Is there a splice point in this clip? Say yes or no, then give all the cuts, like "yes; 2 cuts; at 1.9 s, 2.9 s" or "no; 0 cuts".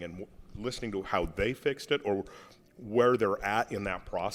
no; 0 cuts